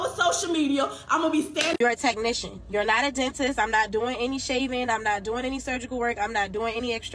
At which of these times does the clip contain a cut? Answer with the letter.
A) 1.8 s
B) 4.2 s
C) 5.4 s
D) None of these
A